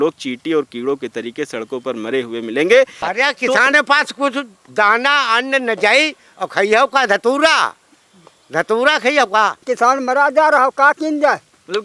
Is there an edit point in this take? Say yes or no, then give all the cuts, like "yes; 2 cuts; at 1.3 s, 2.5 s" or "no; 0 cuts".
yes; 2 cuts; at 3.0 s, 9.6 s